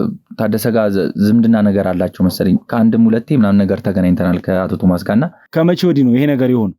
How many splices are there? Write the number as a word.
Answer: one